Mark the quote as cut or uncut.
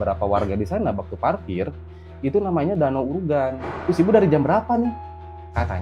cut